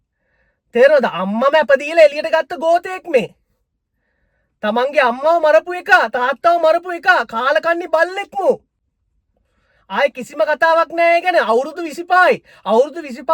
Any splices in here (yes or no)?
no